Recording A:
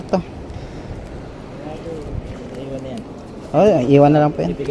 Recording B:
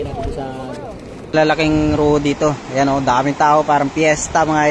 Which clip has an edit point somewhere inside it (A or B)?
B